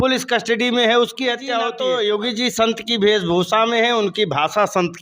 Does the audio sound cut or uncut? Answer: cut